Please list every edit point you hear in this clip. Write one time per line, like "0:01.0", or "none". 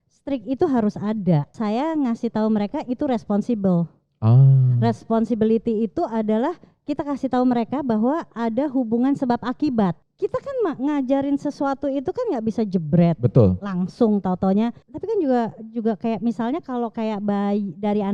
0:01.5
0:10.0
0:14.9